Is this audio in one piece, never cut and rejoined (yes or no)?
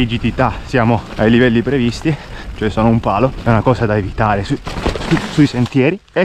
no